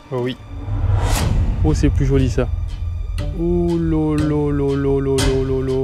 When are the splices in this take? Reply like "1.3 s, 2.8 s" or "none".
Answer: none